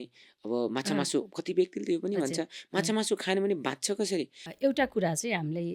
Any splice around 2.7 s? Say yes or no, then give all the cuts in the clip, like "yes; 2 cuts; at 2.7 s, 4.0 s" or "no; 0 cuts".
no; 1 cut; at 4.4 s